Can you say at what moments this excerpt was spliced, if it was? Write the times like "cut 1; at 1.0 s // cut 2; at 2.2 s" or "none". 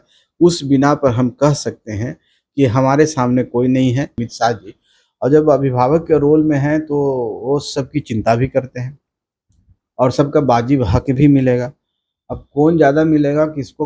cut 1; at 4.2 s